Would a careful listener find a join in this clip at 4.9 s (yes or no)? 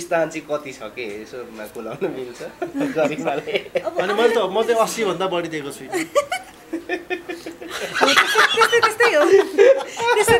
no